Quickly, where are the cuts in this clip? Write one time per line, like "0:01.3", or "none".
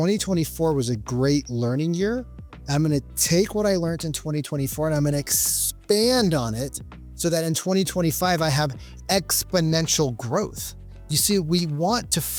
none